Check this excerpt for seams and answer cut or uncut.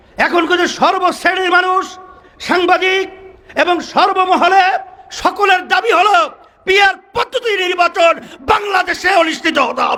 uncut